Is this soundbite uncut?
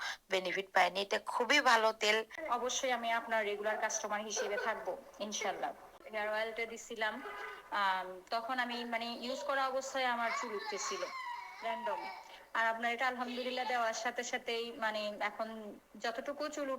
no; 2 cuts; at 2.4 s, 5.9 s

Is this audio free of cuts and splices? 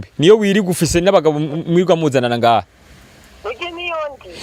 yes; 0 cuts

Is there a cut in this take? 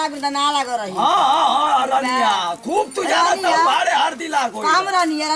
no; 0 cuts

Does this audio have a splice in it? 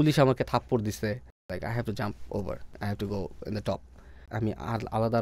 yes; 3 cuts; at 1.5 s, 2.7 s, 4.3 s

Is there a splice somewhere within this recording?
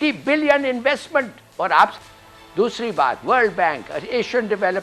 yes; 1 cut; at 1.9 s

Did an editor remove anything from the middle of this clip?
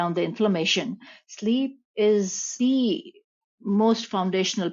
yes; 1 cut; at 2.5 s

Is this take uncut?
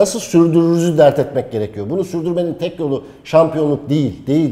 yes; 0 cuts

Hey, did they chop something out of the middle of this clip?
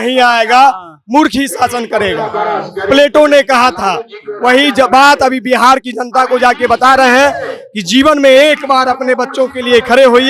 no; 0 cuts

